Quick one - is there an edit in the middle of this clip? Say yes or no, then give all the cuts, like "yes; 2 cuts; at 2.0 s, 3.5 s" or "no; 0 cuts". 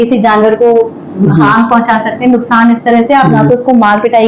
no; 0 cuts